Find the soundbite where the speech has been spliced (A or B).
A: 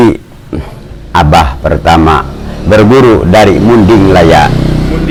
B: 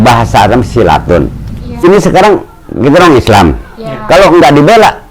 B